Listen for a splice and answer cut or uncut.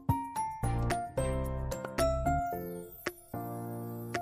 uncut